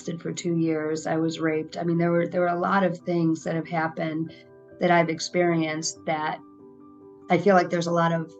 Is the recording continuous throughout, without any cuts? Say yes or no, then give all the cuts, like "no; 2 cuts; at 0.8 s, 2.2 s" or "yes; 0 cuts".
yes; 0 cuts